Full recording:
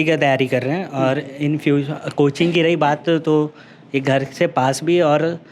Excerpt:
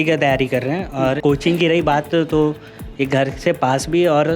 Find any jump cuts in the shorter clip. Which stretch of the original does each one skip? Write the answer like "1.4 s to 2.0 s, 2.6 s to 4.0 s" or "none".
1.2 s to 2.1 s

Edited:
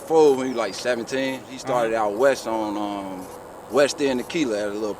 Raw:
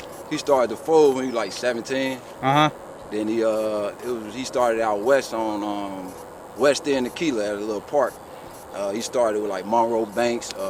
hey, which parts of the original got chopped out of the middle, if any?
2.3 s to 4.3 s

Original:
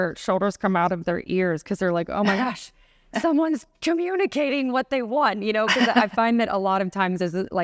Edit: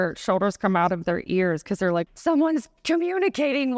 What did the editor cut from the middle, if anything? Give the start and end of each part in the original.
2.1 s to 3.1 s

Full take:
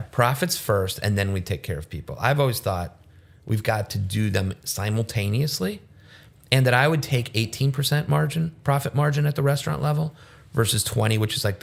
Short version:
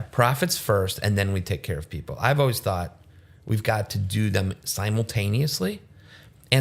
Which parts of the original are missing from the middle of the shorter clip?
none

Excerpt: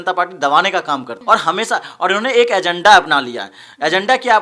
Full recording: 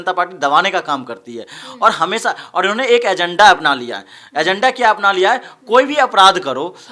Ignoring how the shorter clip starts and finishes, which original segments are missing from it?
1.1 s to 1.7 s

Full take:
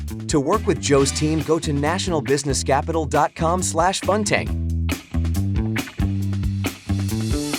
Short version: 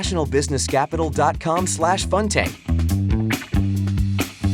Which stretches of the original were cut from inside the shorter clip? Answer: 4.5 s to 5.0 s

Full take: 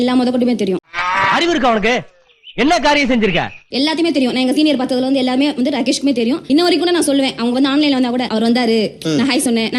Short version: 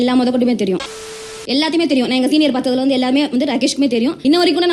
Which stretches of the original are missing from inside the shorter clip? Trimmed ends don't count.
1.1 s to 3.4 s

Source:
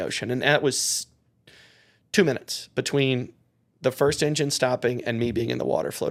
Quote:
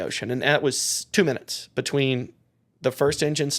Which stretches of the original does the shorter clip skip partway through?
0.9 s to 1.9 s

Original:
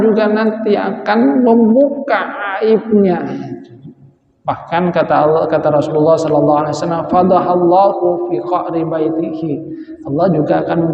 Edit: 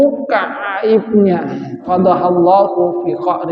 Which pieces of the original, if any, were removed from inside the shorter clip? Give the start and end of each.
3.6 s to 7.1 s

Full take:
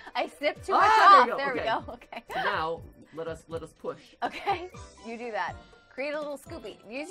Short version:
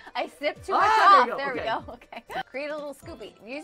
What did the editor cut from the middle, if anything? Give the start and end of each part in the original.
2.4 s to 5.9 s

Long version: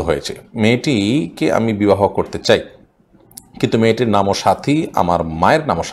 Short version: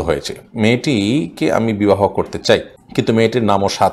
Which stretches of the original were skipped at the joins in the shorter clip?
2.8 s to 3.4 s

